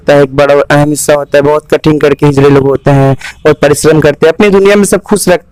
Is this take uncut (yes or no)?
yes